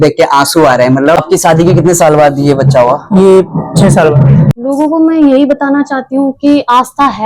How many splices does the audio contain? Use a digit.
2